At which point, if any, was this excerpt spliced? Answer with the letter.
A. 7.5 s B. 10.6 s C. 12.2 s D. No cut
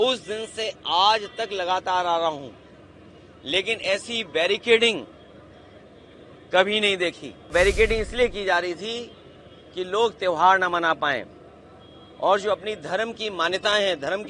A